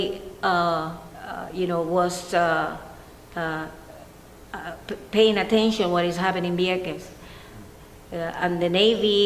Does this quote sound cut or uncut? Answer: cut